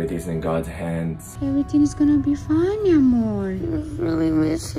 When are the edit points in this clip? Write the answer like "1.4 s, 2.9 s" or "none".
1.3 s